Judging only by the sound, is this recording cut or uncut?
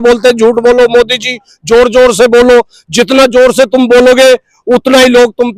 uncut